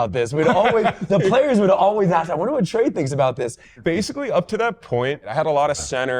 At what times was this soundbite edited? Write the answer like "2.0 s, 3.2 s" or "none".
3.7 s, 5.3 s